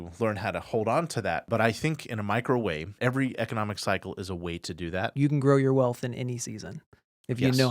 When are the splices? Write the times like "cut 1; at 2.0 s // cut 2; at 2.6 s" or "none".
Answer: cut 1; at 1.5 s // cut 2; at 2.9 s // cut 3; at 5.1 s